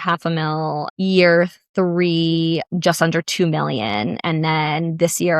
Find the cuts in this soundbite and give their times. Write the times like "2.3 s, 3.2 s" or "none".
0.9 s, 2.7 s